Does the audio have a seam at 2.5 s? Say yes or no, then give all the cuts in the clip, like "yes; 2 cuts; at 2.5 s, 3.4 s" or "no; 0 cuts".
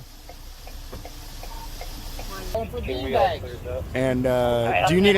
yes; 1 cut; at 2.5 s